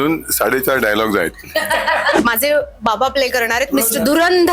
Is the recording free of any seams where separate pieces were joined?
no; 1 cut; at 2.2 s

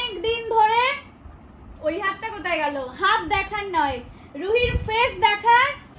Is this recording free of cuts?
yes; 0 cuts

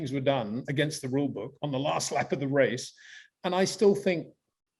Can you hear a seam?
no; 0 cuts

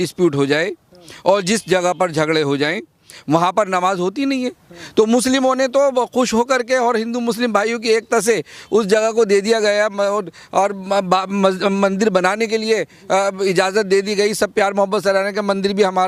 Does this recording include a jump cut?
no; 0 cuts

